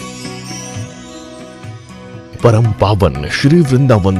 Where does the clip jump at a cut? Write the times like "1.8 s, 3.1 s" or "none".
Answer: 0.9 s